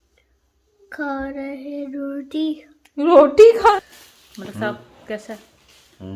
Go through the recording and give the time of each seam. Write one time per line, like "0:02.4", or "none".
0:03.8

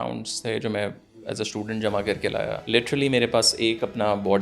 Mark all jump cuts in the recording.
0:02.6

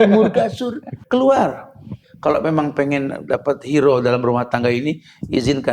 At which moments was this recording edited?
0:00.9
0:02.0

